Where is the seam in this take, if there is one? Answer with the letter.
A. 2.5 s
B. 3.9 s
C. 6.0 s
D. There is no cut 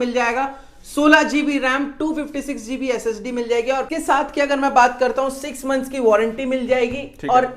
B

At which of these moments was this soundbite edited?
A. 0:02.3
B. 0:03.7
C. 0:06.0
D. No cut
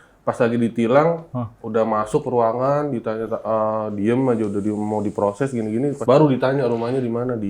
C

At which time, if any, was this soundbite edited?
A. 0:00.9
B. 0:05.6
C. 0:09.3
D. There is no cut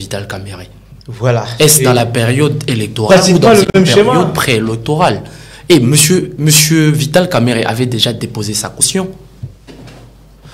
D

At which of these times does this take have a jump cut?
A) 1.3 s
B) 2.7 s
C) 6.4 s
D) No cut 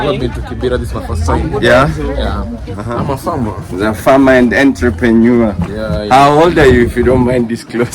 B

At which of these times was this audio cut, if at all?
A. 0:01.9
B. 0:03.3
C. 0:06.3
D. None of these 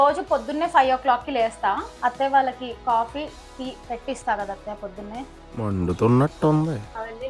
A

